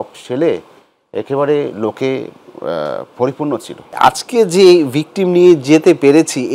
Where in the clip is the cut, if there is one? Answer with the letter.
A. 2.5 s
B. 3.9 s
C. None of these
B